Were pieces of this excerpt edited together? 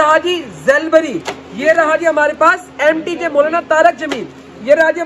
no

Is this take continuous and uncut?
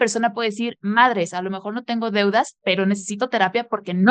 yes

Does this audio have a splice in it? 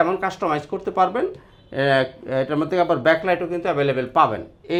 no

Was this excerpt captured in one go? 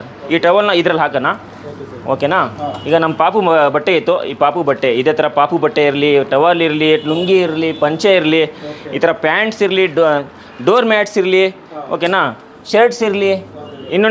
yes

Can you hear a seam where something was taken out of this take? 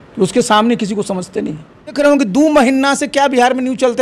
yes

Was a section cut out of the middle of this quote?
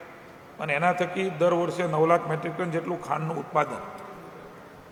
no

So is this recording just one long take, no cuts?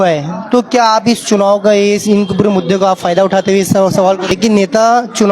no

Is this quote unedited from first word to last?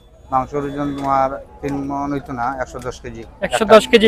yes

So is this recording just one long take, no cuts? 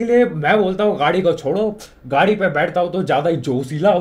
yes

